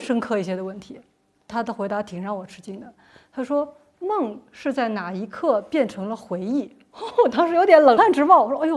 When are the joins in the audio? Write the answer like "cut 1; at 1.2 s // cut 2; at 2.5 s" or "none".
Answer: none